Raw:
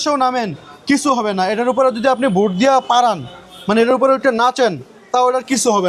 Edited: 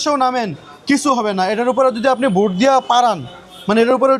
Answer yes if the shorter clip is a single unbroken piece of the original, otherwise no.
yes